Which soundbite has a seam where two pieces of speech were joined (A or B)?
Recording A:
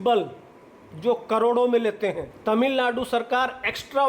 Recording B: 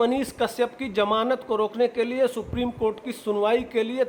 A